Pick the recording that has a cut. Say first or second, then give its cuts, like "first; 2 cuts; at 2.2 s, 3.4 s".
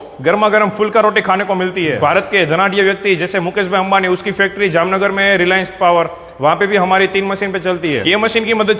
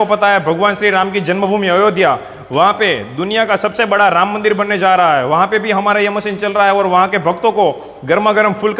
first; 2 cuts; at 2.0 s, 8.0 s